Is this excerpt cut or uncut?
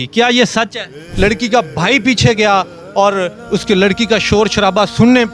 cut